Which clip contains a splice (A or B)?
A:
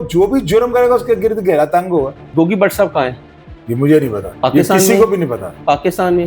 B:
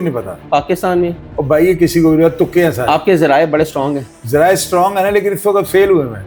A